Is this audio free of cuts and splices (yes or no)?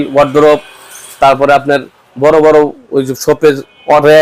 yes